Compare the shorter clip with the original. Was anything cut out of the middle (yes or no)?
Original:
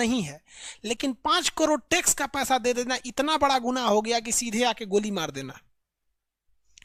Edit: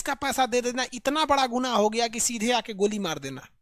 no